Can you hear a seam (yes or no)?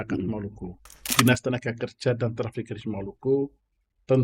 yes